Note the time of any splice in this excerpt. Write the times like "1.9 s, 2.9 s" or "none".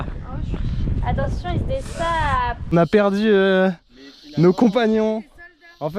2.6 s

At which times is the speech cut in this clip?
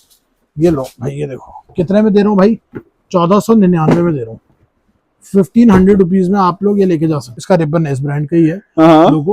7.3 s

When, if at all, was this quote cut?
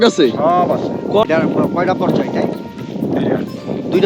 1.2 s

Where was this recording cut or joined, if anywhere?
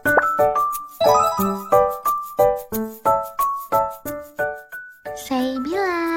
none

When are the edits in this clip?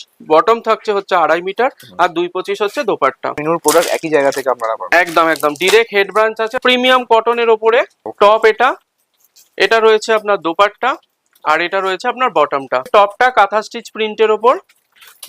3.4 s, 6.6 s, 8.0 s, 12.9 s

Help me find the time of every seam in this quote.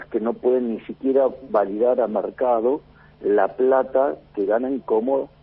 none

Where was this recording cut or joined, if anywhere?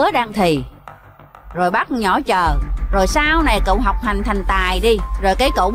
none

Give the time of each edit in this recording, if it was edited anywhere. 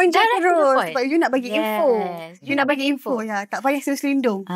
none

